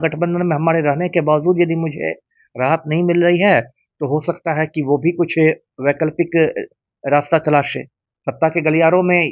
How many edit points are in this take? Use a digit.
0